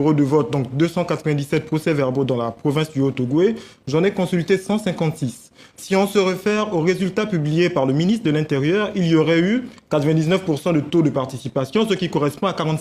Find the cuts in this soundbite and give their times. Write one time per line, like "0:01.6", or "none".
0:10.4

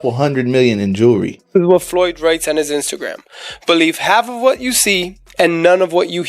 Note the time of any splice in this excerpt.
0:01.5

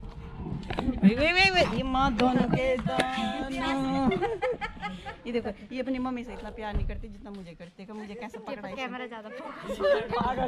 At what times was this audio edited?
none

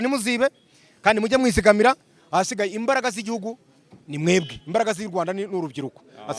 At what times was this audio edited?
none

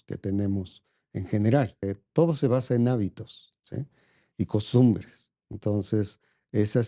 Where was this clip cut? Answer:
0:01.9

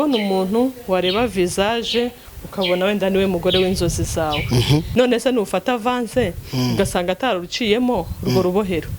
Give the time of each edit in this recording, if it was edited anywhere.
0:04.9

